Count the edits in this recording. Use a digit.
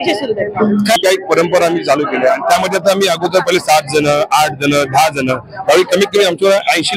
1